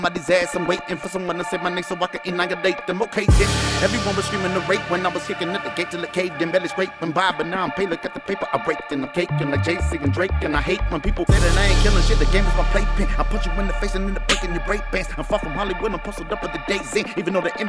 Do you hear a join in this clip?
no; 0 cuts

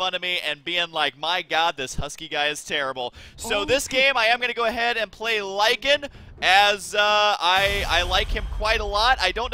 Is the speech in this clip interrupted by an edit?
yes; 1 cut; at 6.8 s

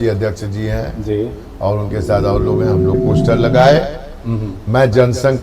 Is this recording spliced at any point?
yes; 1 cut; at 2.9 s

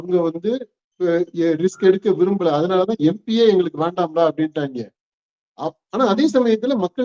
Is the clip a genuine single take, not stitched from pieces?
yes; 0 cuts

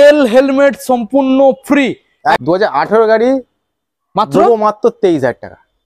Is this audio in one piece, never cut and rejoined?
no; 1 cut; at 2.4 s

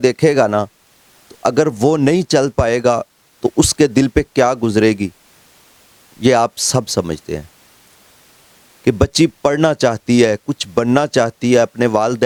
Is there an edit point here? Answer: no; 0 cuts

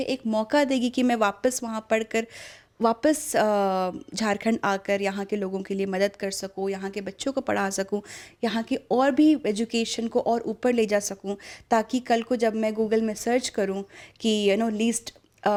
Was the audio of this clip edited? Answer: no; 0 cuts

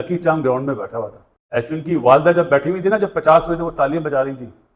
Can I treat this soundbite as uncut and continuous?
yes; 0 cuts

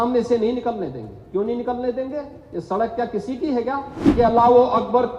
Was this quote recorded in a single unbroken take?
no; 1 cut; at 4.0 s

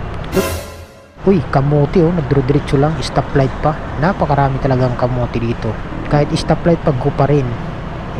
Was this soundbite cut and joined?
yes; 1 cut; at 5.9 s

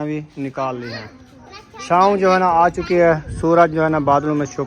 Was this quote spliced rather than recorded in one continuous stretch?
no; 0 cuts

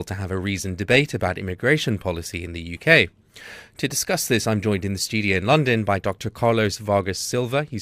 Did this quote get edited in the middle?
yes; 1 cut; at 1.2 s

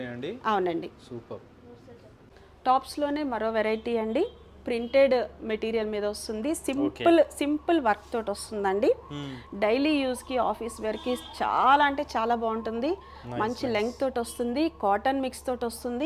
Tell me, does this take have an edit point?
no; 0 cuts

